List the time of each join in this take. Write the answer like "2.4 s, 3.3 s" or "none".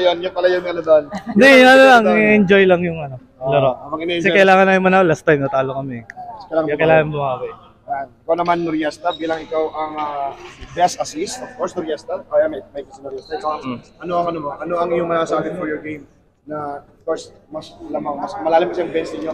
none